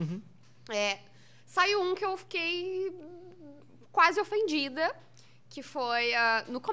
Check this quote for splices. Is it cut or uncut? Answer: uncut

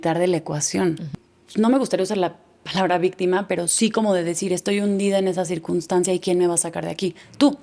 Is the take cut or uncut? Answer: cut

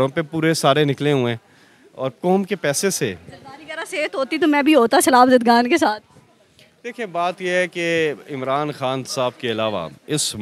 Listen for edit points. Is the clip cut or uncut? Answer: uncut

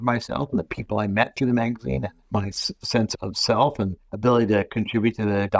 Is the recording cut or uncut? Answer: uncut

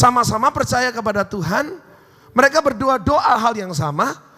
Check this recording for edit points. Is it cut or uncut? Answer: uncut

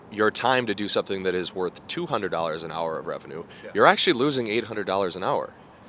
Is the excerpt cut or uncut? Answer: uncut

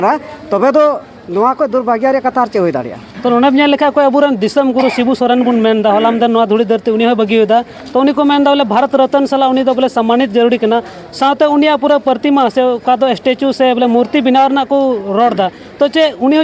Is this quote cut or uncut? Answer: uncut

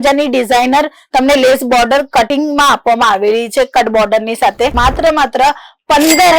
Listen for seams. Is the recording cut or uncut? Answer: cut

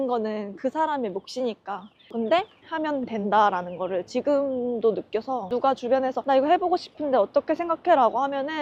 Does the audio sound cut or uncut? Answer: uncut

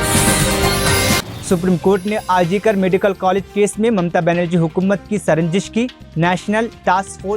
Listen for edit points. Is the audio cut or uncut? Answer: cut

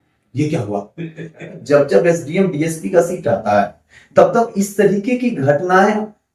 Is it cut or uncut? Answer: cut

